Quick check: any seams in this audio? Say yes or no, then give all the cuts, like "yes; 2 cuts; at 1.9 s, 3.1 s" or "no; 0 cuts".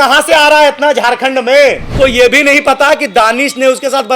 yes; 1 cut; at 1.9 s